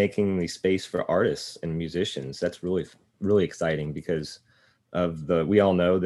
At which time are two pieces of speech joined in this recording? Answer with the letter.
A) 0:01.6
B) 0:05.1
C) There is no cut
C